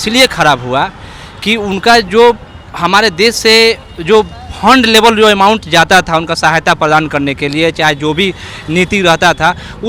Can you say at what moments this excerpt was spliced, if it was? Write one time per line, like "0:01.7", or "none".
none